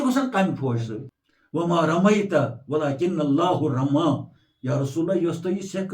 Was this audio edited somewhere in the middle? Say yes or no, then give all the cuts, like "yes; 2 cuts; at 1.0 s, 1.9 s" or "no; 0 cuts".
yes; 1 cut; at 1.0 s